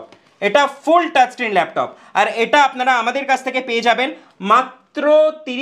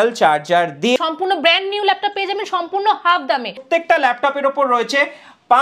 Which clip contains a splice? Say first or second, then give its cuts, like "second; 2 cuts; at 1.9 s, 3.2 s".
second; 2 cuts; at 1.0 s, 3.6 s